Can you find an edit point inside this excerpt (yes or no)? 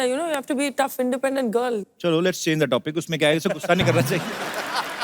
yes